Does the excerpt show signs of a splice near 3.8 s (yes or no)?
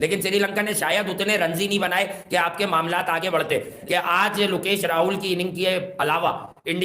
yes